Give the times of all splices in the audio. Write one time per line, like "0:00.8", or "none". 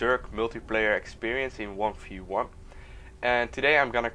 0:01.2